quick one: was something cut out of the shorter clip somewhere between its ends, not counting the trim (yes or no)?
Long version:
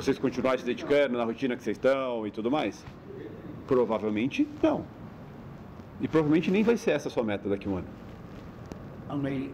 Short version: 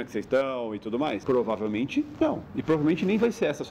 yes